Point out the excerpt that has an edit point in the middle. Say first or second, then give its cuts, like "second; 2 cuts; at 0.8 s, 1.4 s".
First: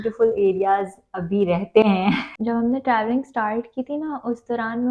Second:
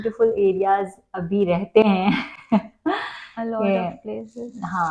first; 1 cut; at 2.3 s